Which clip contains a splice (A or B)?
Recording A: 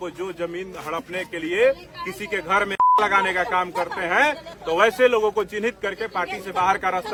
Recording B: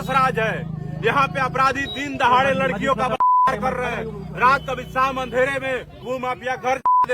B